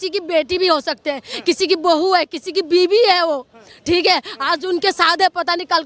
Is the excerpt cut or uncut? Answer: uncut